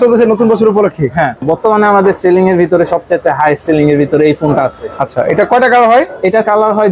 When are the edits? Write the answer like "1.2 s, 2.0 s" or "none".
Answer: 1.4 s